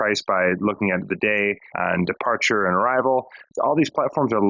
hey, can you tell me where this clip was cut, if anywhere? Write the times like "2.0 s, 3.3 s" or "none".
1.7 s, 3.4 s